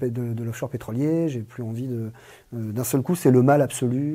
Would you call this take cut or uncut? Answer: uncut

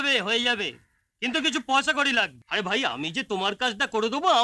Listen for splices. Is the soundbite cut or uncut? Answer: cut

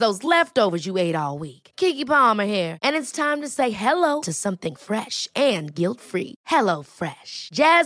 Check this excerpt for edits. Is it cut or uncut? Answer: uncut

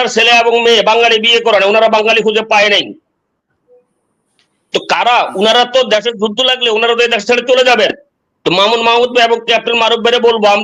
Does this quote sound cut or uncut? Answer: uncut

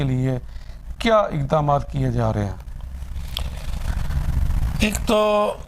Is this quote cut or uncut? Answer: uncut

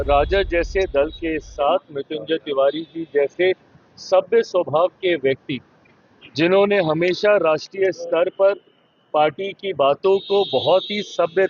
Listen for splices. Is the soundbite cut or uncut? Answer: uncut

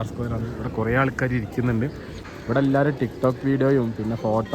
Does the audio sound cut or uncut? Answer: cut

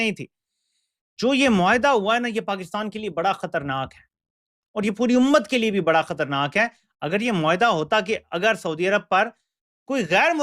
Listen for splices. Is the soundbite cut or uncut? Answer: uncut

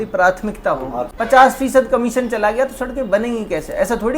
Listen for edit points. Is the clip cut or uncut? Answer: cut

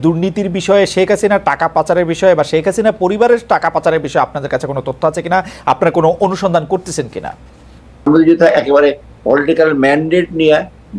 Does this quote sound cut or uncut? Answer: cut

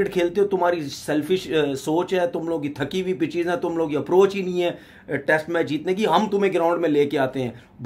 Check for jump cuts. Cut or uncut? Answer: uncut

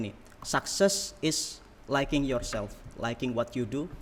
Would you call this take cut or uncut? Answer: uncut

